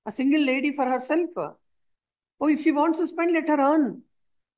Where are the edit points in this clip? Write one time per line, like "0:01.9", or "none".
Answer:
none